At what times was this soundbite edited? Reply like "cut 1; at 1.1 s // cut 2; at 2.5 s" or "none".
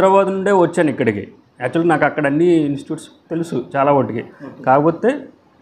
none